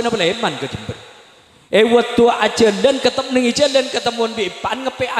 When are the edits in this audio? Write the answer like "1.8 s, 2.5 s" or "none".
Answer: none